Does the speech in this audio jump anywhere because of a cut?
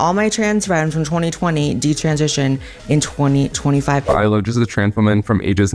yes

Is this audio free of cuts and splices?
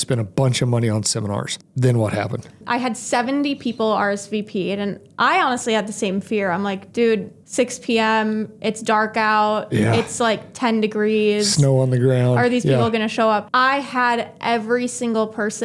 no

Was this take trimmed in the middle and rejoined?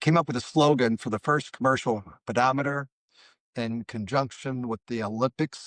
no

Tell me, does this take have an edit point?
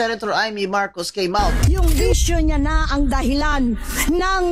yes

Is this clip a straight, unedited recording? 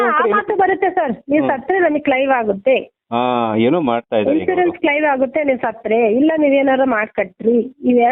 yes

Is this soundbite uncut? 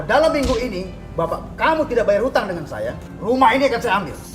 no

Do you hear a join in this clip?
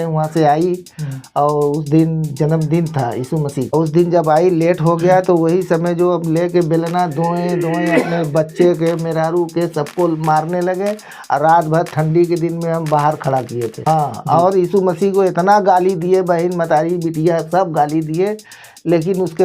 yes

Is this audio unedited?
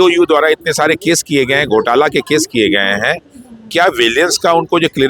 yes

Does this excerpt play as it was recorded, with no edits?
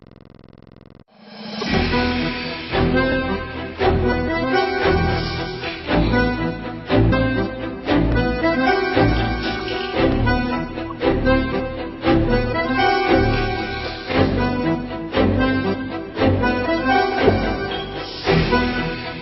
no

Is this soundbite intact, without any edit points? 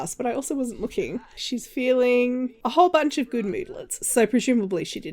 no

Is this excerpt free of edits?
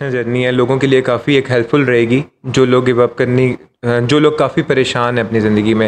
yes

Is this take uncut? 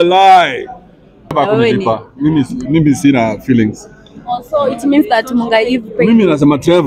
no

